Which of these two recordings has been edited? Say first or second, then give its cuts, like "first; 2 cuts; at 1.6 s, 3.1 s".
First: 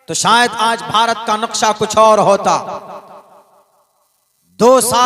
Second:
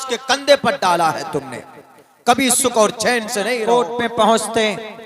second; 1 cut; at 3.5 s